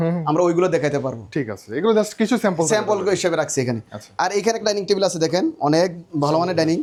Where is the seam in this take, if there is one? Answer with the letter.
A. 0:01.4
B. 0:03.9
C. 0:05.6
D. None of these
D